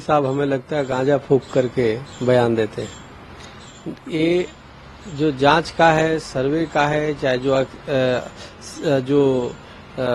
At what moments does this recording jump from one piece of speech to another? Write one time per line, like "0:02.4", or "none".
none

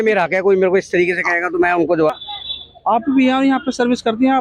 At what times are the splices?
0:02.2

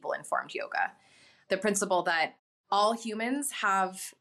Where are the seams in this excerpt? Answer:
0:01.3

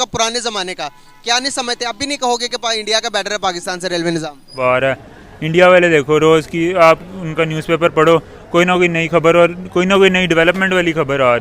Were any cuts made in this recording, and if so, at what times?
0:04.6

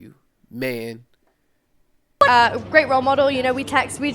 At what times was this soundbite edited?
0:02.3

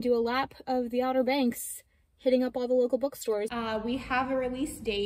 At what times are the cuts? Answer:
0:03.5

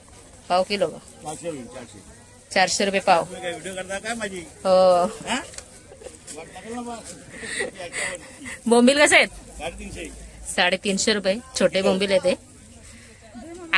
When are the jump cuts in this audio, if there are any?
none

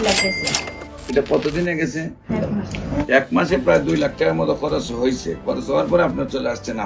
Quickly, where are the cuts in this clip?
0:02.3

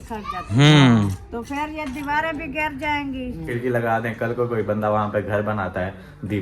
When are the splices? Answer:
0:03.5

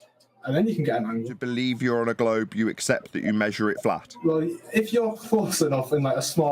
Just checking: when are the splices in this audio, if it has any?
0:01.4
0:04.1

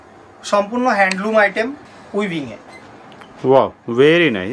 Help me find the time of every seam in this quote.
0:01.8

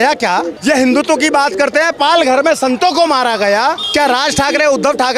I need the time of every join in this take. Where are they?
0:03.8

